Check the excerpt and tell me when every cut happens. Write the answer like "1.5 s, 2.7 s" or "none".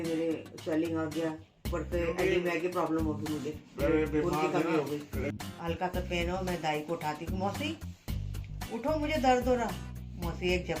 1.5 s, 5.4 s